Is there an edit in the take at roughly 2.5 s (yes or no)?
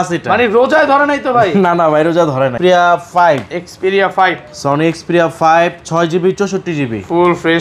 yes